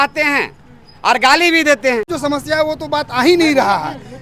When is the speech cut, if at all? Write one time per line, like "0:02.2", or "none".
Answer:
0:02.1

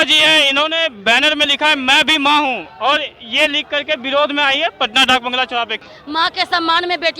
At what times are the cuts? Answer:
0:05.8

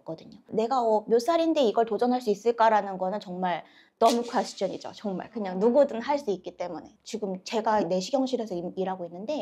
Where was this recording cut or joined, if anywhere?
none

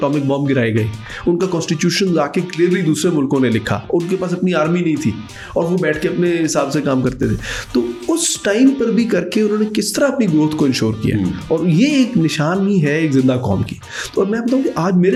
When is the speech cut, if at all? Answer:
none

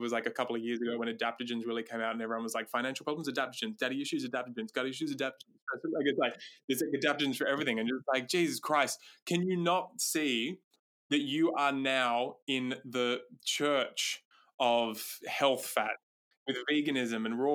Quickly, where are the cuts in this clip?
none

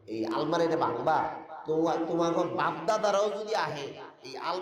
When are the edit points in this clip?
0:01.5

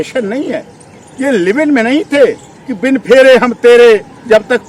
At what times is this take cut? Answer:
none

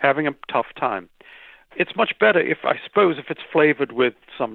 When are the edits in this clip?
0:01.6

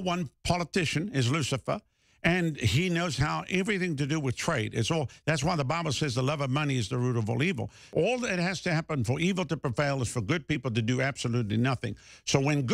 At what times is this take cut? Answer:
0:07.9

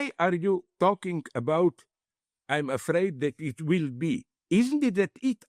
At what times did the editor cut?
none

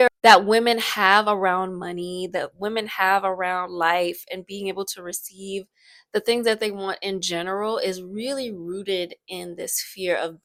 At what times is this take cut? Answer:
none

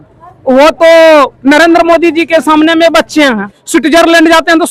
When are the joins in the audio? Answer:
0:03.6

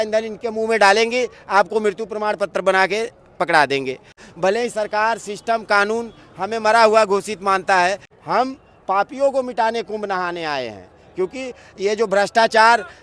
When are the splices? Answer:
0:04.2
0:08.1

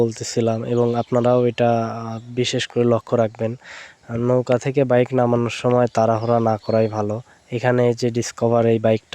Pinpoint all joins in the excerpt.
none

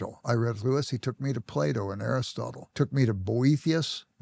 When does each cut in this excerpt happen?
0:02.6

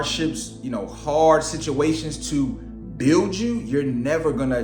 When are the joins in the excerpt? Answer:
none

